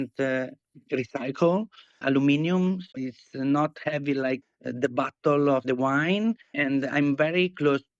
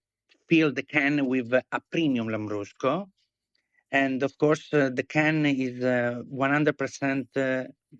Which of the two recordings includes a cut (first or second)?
first